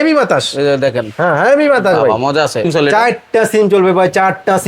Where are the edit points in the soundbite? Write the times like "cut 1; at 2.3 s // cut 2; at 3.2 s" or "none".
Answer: cut 1; at 2.7 s